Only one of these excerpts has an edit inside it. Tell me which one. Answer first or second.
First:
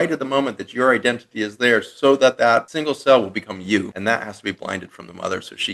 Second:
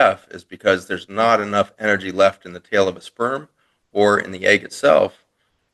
first